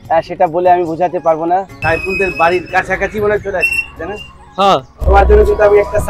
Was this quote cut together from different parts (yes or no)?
yes